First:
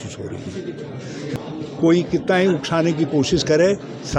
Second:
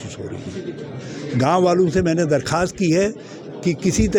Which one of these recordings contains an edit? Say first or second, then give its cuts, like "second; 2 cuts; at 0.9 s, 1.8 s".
first; 1 cut; at 1.2 s